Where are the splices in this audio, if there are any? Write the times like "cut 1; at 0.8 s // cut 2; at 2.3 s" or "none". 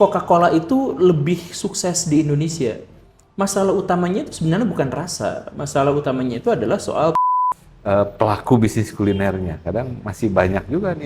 cut 1; at 7.1 s